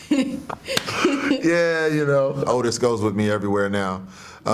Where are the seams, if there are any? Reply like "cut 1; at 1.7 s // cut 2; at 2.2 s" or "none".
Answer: cut 1; at 2.4 s